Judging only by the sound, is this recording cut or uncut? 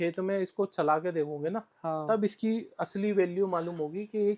uncut